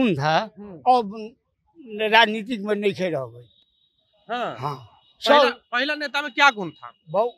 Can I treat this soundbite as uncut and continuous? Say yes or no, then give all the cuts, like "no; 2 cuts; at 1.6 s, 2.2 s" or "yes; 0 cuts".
yes; 0 cuts